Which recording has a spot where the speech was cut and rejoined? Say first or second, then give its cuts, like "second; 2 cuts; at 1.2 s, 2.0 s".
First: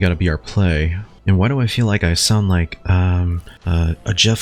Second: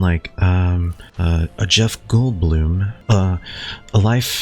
second; 1 cut; at 2.9 s